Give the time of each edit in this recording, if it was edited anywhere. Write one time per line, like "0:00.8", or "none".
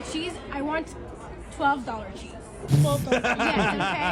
none